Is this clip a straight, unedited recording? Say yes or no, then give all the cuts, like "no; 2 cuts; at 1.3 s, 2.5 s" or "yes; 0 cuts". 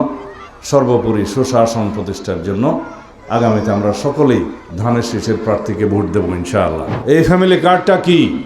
no; 1 cut; at 6.9 s